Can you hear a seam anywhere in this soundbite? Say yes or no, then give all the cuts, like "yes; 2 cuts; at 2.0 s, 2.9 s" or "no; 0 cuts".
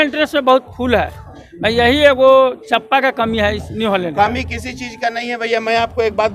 no; 0 cuts